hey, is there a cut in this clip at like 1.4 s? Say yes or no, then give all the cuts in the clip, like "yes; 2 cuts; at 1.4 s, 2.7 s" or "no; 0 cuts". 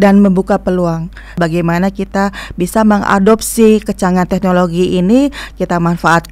yes; 1 cut; at 1.4 s